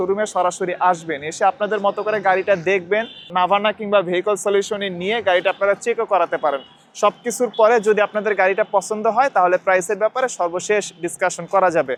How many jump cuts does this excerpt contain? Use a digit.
0